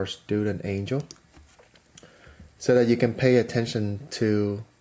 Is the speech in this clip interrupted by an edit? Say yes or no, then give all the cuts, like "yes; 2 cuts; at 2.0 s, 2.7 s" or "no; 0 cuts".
no; 0 cuts